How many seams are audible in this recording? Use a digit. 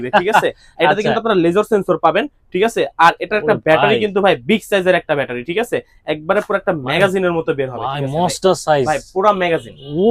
0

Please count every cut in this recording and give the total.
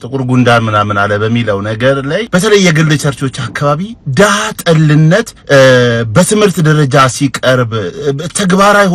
2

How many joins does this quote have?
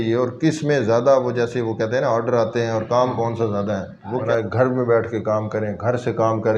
1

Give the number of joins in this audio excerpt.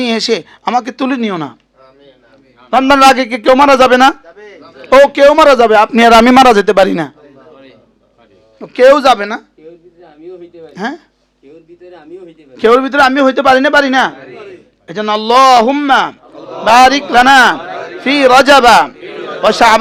0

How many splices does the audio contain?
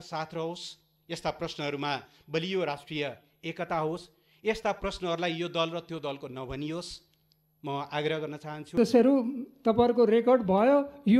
1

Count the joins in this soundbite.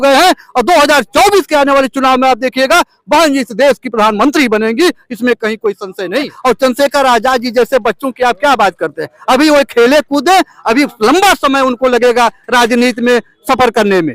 1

